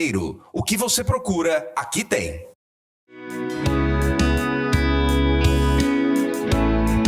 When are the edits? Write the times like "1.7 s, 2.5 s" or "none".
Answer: 3.3 s